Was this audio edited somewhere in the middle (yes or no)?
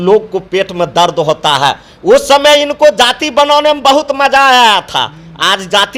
no